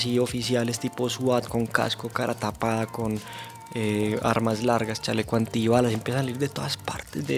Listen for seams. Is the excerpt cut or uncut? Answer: uncut